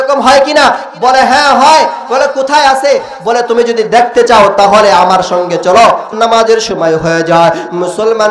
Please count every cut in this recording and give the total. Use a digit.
1